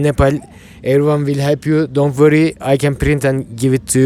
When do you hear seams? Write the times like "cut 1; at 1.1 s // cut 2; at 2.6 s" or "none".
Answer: none